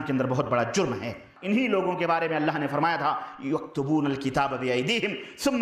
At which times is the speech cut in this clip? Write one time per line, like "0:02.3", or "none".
0:01.3